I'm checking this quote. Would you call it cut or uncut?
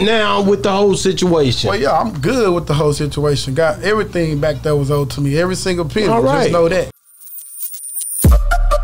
cut